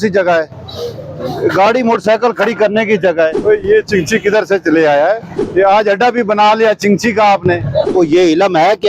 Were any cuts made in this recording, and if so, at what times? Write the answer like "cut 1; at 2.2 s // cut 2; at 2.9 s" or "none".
cut 1; at 3.4 s // cut 2; at 5.4 s // cut 3; at 7.9 s